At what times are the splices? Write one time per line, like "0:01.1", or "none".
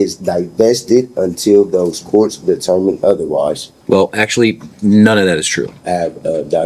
0:03.7
0:05.8